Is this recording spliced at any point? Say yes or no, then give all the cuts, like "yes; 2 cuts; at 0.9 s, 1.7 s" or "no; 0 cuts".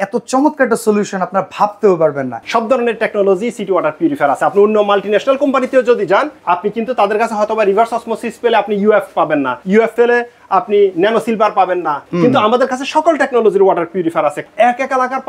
yes; 5 cuts; at 2.4 s, 6.4 s, 9.8 s, 12.1 s, 14.4 s